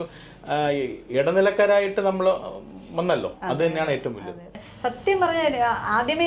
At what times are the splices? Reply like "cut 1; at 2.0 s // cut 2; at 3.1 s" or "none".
cut 1; at 4.7 s